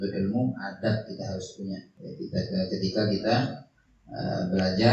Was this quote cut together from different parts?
yes; 1 cut; at 2.0 s

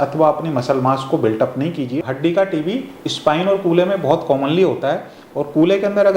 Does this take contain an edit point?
yes; 1 cut; at 2.0 s

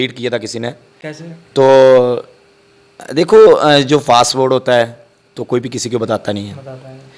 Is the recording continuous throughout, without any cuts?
yes; 0 cuts

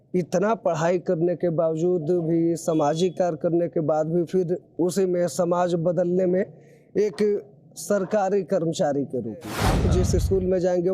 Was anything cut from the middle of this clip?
yes; 1 cut; at 9.7 s

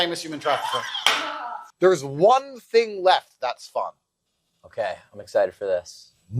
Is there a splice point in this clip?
yes; 1 cut; at 1.6 s

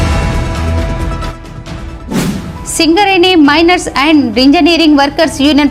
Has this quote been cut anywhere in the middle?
yes; 1 cut; at 1.0 s

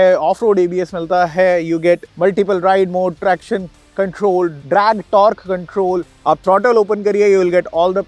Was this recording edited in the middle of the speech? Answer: yes; 1 cut; at 6.1 s

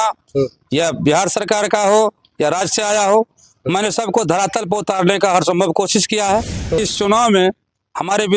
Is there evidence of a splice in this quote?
yes; 1 cut; at 6.8 s

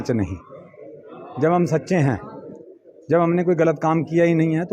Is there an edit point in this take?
no; 0 cuts

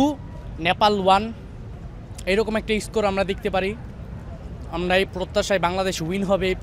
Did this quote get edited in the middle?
no; 0 cuts

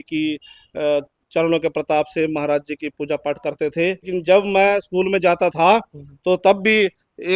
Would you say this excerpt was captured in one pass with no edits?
no; 1 cut; at 4.1 s

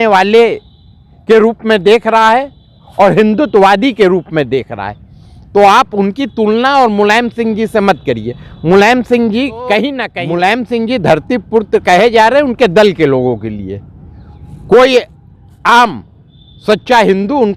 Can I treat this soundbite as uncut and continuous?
no; 1 cut; at 10.0 s

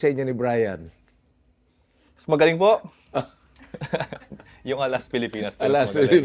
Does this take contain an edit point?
no; 0 cuts

